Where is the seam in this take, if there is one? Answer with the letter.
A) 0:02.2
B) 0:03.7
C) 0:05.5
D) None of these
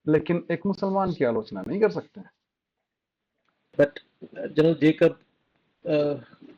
B